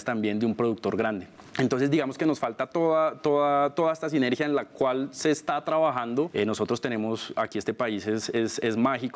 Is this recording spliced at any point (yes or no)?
yes